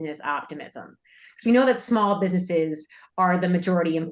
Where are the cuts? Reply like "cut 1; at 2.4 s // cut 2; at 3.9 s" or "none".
none